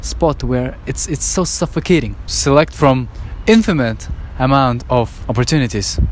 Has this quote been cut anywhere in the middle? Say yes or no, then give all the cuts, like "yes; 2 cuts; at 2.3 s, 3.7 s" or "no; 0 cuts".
yes; 2 cuts; at 2.2 s, 5.2 s